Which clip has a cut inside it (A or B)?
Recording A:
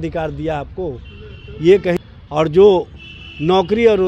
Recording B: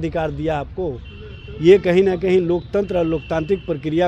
A